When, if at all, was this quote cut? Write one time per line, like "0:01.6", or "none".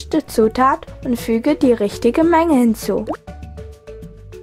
0:03.1

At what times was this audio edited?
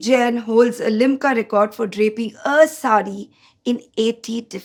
none

